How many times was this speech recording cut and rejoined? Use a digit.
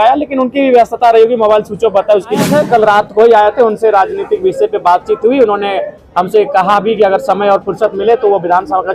1